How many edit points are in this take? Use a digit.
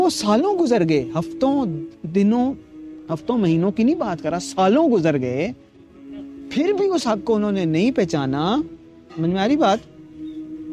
0